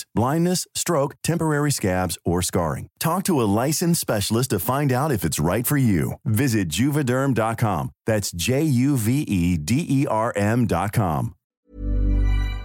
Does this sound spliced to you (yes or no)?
yes